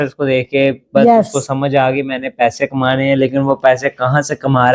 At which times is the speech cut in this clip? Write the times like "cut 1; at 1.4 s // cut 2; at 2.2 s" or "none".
none